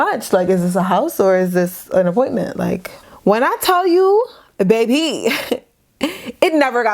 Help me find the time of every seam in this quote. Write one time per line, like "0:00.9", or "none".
0:02.9